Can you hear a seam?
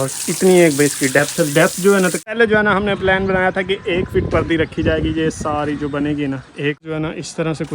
yes; 2 cuts; at 2.3 s, 6.8 s

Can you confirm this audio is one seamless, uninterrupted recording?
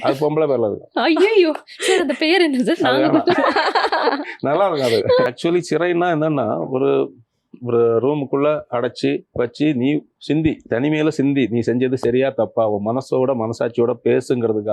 no; 1 cut; at 5.3 s

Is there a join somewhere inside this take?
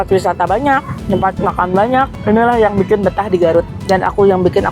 yes; 3 cuts; at 0.9 s, 2.2 s, 3.8 s

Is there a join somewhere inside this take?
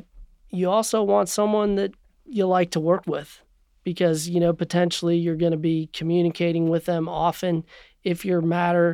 no; 0 cuts

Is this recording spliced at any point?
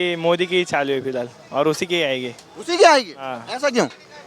no; 0 cuts

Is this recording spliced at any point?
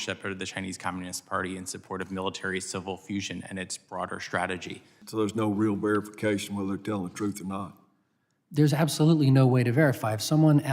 yes; 1 cut; at 5.0 s

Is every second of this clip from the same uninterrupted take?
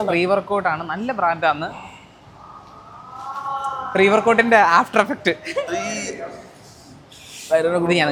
yes; 0 cuts

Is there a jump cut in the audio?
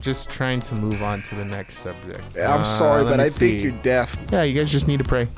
yes; 1 cut; at 4.1 s

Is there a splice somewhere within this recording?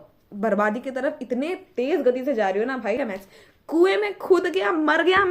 yes; 1 cut; at 3.0 s

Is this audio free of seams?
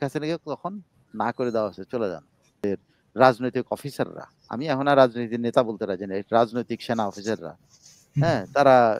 no; 1 cut; at 2.6 s

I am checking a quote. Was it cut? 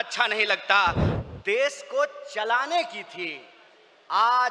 yes; 1 cut; at 1.0 s

